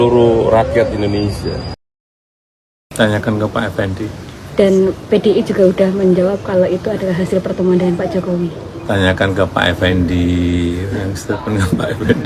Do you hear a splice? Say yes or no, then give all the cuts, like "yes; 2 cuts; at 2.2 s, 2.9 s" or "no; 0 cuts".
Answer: no; 0 cuts